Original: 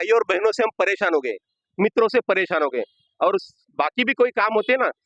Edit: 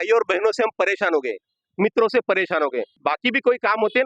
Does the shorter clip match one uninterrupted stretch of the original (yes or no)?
no